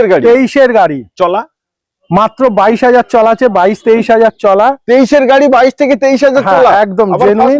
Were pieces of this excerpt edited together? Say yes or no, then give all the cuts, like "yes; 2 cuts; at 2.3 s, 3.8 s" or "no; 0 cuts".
no; 0 cuts